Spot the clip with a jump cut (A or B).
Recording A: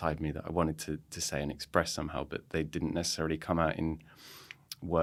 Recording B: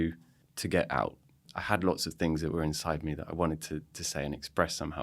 B